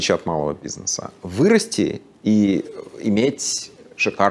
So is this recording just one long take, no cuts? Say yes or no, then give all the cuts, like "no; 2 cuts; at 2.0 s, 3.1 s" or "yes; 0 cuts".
yes; 0 cuts